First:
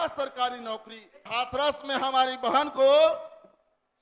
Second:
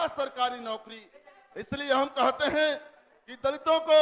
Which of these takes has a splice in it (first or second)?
first